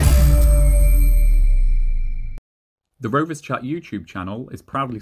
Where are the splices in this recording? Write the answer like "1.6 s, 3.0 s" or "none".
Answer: 3.0 s